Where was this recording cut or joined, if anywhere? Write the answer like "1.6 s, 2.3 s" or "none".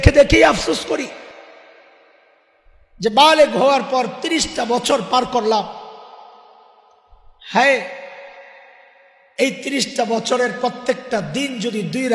1.3 s

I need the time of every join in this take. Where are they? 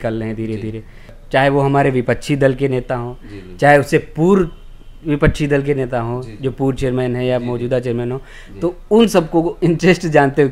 1.1 s

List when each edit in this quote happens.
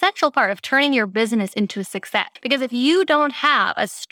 2.3 s

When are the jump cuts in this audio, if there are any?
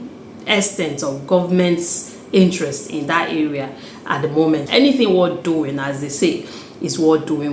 4.7 s

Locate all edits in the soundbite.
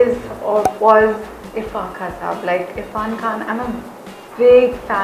none

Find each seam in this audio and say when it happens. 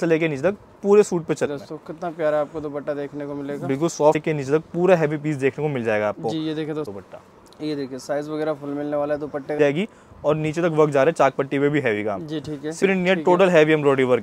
1.5 s, 4.2 s, 6.9 s, 9.6 s, 12.8 s

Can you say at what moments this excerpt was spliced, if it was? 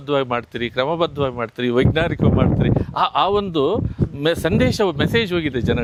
none

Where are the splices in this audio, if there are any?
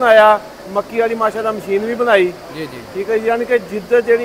none

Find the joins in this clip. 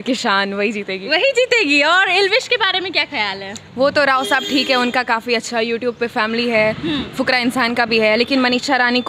none

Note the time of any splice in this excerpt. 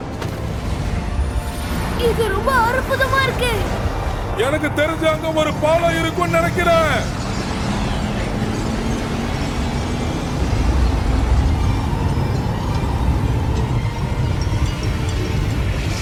none

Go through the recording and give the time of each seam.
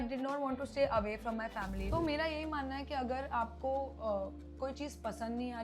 1.8 s

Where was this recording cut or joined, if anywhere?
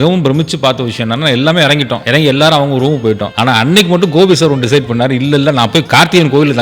2.0 s, 3.3 s

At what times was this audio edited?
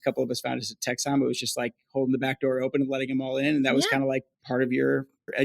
4.3 s

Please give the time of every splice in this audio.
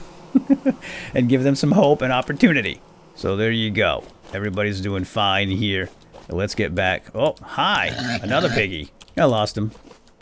none

